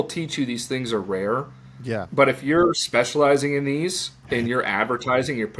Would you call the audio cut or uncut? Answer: uncut